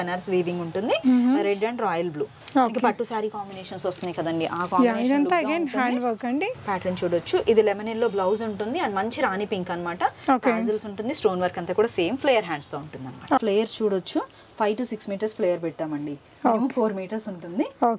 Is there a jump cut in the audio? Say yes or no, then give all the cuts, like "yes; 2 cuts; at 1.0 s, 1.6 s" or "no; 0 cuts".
yes; 2 cuts; at 6.6 s, 13.4 s